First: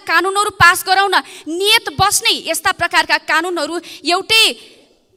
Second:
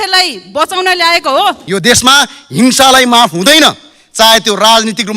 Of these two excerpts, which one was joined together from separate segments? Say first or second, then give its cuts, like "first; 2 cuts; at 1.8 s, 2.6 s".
second; 1 cut; at 1.6 s